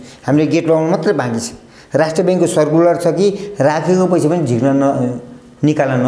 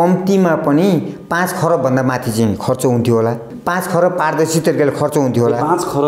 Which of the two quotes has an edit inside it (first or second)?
second